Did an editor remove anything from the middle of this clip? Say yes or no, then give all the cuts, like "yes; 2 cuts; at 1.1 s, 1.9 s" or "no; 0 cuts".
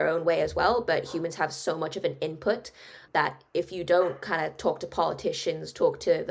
yes; 1 cut; at 3.0 s